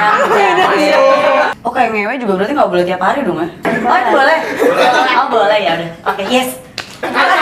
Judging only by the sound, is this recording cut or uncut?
cut